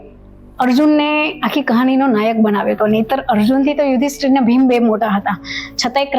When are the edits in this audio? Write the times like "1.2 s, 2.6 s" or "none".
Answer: none